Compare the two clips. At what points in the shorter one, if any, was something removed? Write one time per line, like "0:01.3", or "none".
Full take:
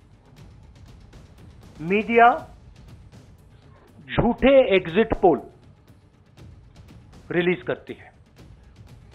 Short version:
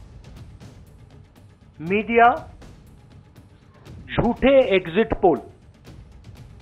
0:05.7